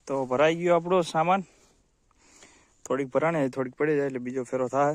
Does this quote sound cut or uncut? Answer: uncut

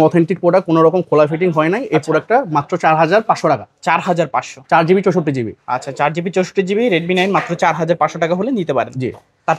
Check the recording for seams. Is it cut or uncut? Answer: uncut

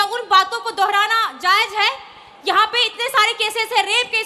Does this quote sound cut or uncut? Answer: uncut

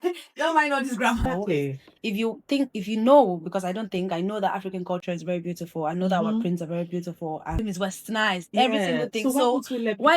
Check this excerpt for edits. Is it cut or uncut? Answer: cut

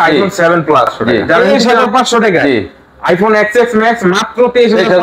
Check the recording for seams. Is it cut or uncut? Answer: cut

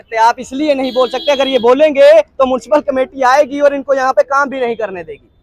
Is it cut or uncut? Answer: uncut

